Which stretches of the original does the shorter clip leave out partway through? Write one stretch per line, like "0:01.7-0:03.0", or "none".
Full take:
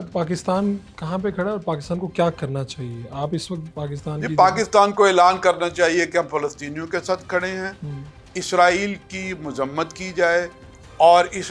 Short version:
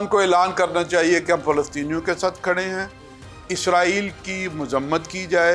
none